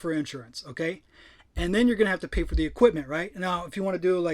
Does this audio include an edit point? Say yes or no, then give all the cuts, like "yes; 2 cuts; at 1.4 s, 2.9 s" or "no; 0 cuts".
no; 0 cuts